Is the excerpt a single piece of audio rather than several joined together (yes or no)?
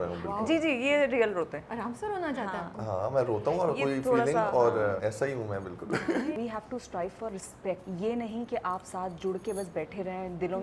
no